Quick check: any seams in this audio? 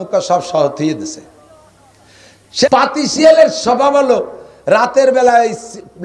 yes; 1 cut; at 2.7 s

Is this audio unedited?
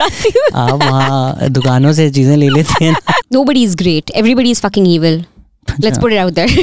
no; 1 cut; at 3.2 s

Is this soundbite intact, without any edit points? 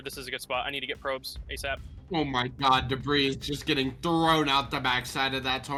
yes; 0 cuts

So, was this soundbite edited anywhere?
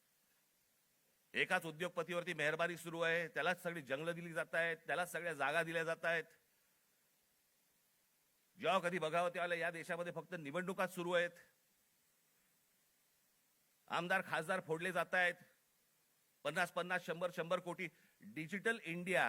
no; 0 cuts

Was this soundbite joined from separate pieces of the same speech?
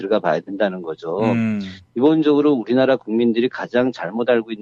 yes; 1 cut; at 1.6 s

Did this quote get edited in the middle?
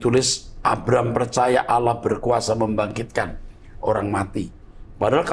no; 0 cuts

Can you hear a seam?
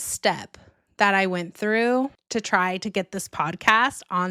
no; 0 cuts

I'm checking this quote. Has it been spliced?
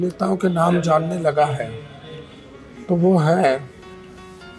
no; 0 cuts

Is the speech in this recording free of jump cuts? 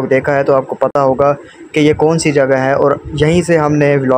yes; 0 cuts

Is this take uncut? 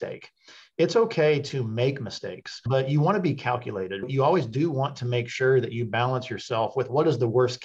no; 1 cut; at 4.0 s

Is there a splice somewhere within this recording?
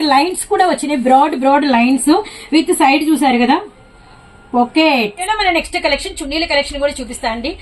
yes; 1 cut; at 5.2 s

